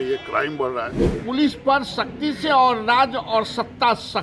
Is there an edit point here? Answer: yes; 1 cut; at 1.2 s

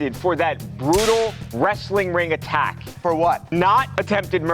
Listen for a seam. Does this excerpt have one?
no; 0 cuts

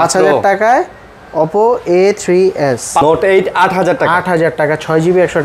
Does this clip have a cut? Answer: yes; 1 cut; at 3.0 s

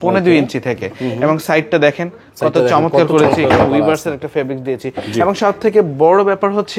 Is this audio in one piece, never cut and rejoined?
yes; 0 cuts

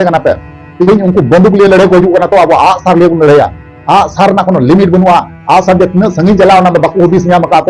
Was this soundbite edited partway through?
no; 0 cuts

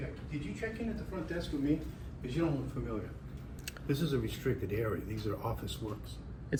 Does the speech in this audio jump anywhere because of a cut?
no; 0 cuts

